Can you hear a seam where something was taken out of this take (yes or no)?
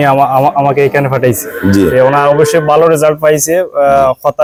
no